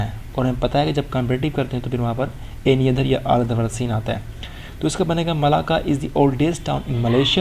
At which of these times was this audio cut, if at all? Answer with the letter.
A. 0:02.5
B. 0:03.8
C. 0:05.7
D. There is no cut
D